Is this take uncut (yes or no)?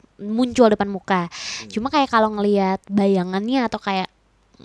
yes